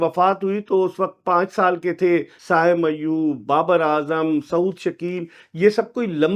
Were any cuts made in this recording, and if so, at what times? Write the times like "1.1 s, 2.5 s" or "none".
2.3 s